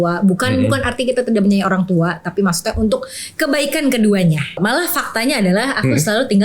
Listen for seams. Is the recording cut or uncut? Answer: cut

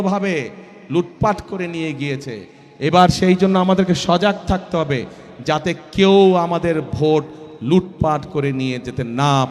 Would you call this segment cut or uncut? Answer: uncut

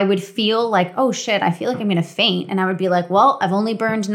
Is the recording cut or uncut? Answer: uncut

